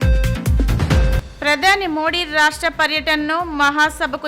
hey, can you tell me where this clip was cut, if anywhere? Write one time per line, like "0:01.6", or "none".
0:00.9

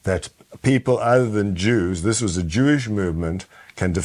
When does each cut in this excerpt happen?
none

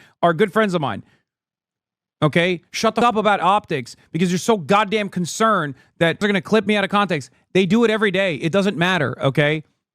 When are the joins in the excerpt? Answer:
0:03.0
0:06.2

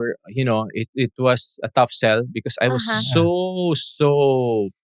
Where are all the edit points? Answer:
none

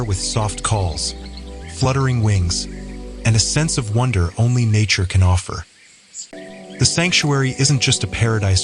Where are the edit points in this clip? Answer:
0:06.3

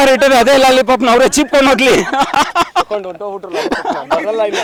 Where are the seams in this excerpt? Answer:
none

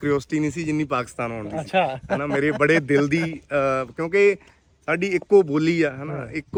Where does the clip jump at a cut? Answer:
none

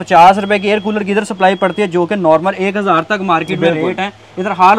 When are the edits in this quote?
none

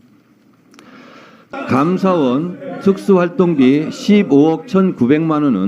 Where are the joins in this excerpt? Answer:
0:01.5

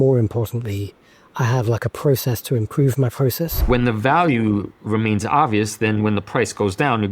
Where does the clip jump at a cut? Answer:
0:03.7

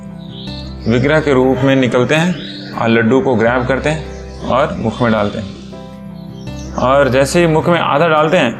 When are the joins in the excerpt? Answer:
none

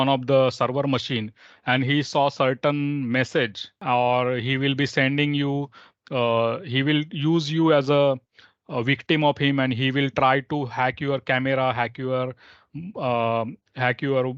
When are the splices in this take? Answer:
0:03.7

